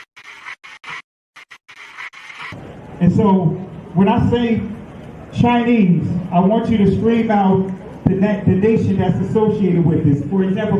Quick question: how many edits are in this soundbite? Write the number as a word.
one